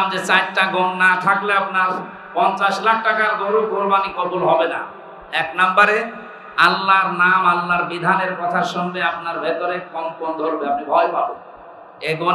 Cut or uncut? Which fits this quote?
uncut